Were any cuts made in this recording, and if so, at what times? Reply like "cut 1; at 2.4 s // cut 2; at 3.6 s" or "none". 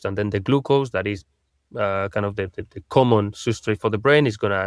none